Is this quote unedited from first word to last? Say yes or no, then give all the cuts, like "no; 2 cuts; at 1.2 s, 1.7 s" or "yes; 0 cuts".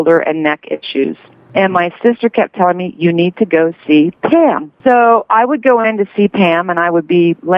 no; 2 cuts; at 1.4 s, 4.7 s